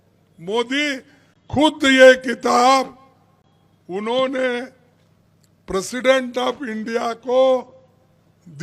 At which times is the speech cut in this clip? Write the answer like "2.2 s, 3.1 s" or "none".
none